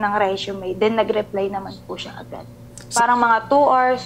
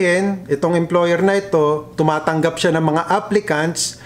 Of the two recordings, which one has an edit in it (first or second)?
first